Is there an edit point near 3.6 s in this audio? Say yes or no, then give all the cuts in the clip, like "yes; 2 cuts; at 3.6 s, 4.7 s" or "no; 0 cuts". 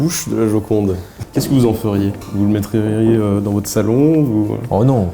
no; 1 cut; at 1.2 s